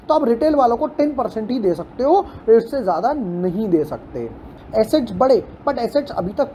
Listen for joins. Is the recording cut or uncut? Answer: cut